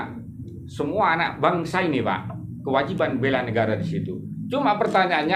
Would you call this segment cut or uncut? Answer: uncut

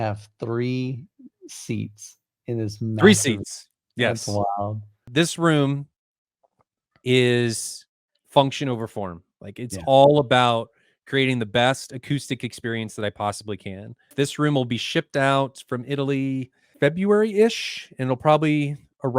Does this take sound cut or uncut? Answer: cut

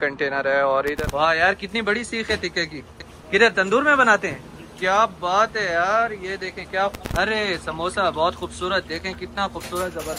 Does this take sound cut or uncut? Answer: cut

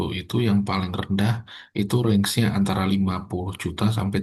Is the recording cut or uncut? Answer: uncut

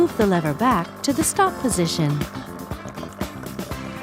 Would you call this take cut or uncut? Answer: cut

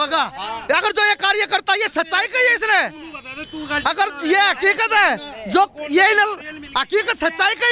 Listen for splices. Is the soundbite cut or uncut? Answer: uncut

